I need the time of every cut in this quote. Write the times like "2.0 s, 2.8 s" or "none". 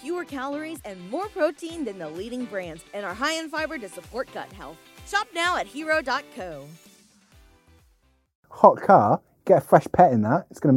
8.4 s